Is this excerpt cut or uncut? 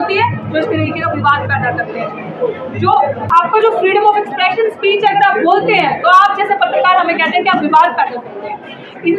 cut